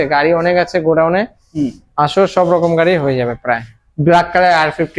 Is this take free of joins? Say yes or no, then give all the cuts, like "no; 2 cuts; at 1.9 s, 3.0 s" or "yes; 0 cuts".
yes; 0 cuts